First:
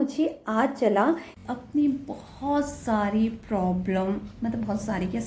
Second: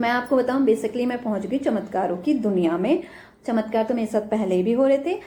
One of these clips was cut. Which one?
first; 1 cut; at 1.4 s

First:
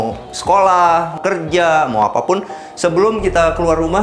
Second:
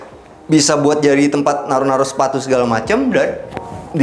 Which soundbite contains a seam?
first; 1 cut; at 1.1 s

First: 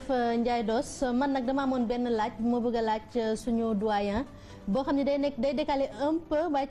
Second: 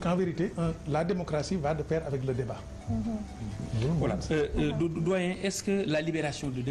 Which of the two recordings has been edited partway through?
second; 1 cut; at 4.0 s

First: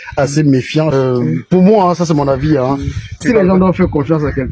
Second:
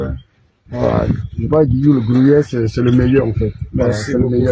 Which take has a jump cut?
first; 2 cuts; at 0.9 s, 3.2 s

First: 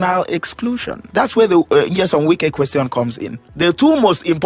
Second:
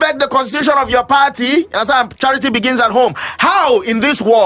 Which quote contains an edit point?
first; 2 cuts; at 1.0 s, 3.5 s

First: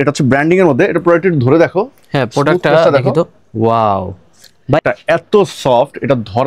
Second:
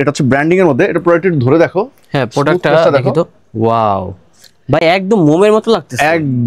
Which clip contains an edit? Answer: first; 1 cut; at 4.8 s

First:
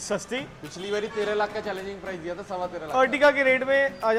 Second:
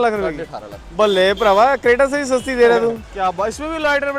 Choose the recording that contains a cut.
second; 1 cut; at 3.1 s

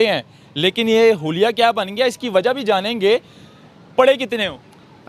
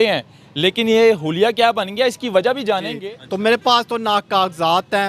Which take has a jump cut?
second; 1 cut; at 2.9 s

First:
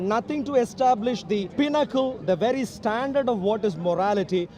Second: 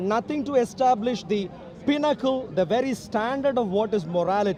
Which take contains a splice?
first; 1 cut; at 1.5 s

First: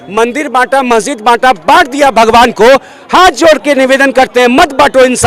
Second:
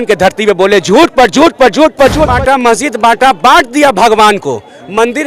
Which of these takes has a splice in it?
second; 1 cut; at 2.3 s

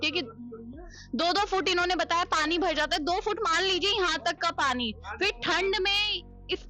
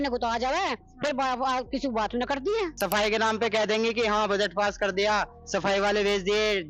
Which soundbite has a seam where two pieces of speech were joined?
second; 1 cut; at 2.7 s

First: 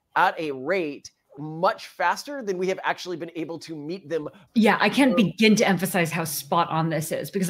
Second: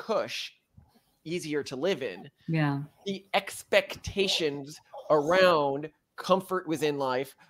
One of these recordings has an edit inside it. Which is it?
first; 2 cuts; at 1.3 s, 4.4 s

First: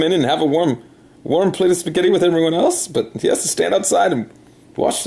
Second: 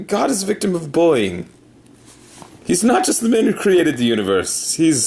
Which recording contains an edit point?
second; 1 cut; at 2.8 s

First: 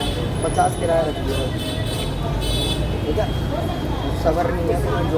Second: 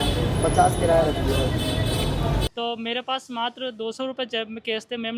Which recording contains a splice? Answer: second; 1 cut; at 2.4 s

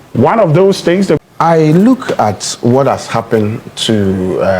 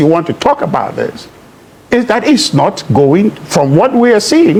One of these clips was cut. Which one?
first; 1 cut; at 1.2 s

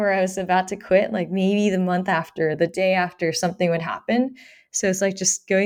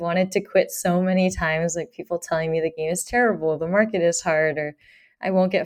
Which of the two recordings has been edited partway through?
second; 1 cut; at 2.8 s

